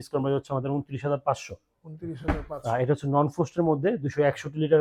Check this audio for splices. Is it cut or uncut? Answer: uncut